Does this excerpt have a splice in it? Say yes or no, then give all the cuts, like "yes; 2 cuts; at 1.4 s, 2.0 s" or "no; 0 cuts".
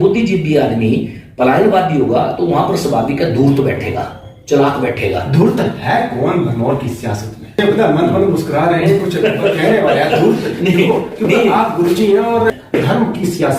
yes; 2 cuts; at 7.6 s, 12.6 s